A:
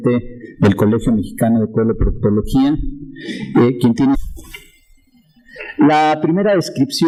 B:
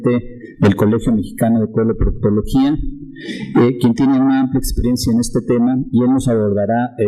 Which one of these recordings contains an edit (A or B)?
B